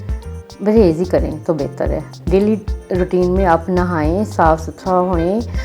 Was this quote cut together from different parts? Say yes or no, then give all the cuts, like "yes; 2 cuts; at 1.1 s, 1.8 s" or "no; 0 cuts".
yes; 1 cut; at 2.1 s